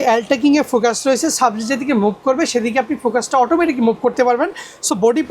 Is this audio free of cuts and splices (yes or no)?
yes